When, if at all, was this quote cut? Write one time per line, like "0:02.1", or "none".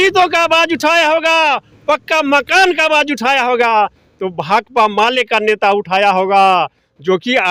none